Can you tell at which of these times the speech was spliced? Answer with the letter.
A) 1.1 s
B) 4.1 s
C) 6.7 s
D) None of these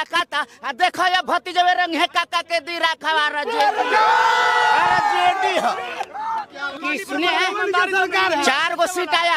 C